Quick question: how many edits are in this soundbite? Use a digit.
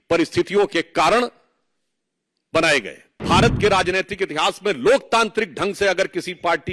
1